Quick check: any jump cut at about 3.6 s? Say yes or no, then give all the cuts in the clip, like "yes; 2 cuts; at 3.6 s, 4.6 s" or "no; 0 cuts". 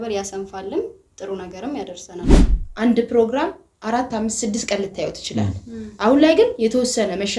no; 1 cut; at 2.4 s